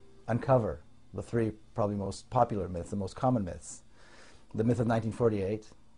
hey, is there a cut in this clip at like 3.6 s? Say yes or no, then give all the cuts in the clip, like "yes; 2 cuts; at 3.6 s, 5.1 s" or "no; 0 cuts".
yes; 1 cut; at 3.6 s